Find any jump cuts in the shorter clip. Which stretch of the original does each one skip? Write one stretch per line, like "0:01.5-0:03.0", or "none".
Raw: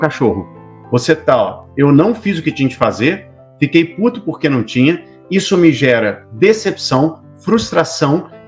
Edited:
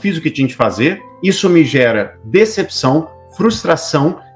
0:03.3-0:05.2